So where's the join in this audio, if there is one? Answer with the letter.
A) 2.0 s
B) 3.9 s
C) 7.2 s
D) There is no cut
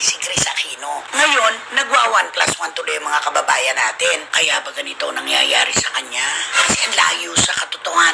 D